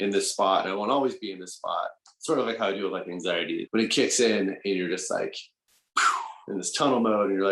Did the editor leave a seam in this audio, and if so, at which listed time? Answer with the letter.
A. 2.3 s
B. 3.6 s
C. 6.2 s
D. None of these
B